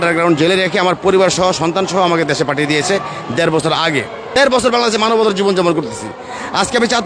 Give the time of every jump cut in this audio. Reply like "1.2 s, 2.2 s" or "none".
4.2 s